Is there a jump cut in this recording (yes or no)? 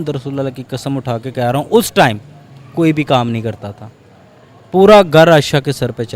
no